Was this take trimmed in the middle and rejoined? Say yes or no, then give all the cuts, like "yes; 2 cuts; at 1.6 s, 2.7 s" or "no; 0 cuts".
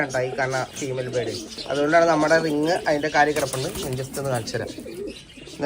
yes; 1 cut; at 1.6 s